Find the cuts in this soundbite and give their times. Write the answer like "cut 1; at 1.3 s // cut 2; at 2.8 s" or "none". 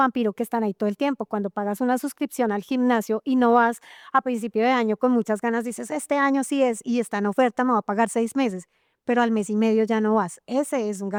none